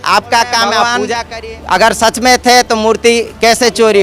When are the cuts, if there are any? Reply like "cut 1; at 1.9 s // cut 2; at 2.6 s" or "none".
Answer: cut 1; at 1.0 s